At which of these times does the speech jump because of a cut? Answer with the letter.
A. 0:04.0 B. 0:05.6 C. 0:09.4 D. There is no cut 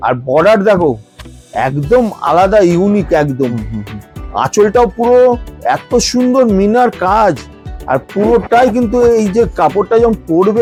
D